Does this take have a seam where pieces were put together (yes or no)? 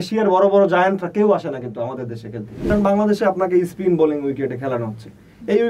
yes